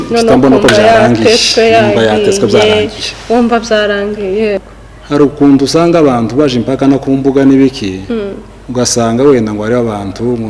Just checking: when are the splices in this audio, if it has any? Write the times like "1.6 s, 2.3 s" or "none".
4.6 s

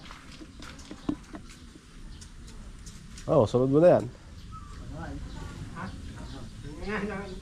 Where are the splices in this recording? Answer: none

